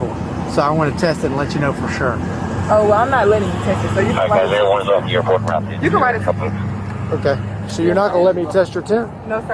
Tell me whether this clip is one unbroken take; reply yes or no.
yes